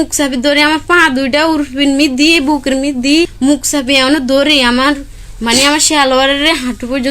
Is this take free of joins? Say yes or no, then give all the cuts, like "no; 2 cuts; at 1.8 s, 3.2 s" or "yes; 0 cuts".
no; 1 cut; at 3.3 s